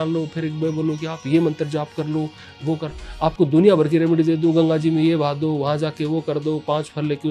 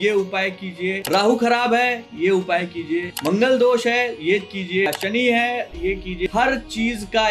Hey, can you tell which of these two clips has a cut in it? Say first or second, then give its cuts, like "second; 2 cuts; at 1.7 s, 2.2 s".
second; 4 cuts; at 1.0 s, 3.1 s, 4.9 s, 6.3 s